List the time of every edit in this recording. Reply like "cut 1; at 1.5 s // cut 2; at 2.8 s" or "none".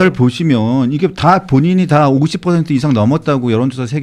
none